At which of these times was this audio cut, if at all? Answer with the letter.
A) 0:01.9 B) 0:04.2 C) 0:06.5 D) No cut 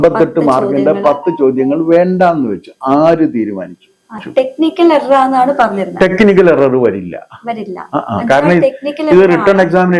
B